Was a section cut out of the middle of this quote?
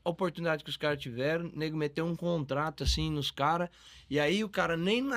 no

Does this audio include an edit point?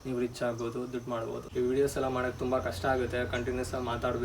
yes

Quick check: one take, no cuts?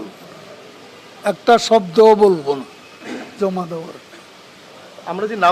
yes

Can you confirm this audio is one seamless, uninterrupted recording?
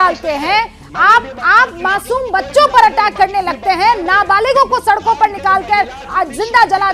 yes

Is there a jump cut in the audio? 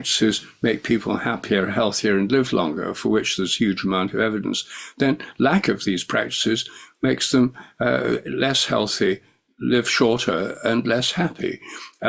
no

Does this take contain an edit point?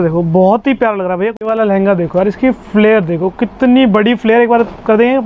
yes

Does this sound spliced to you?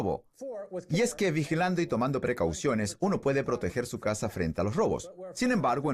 no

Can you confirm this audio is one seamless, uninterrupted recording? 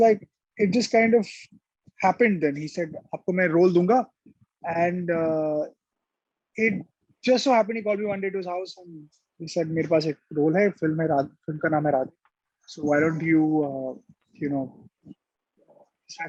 yes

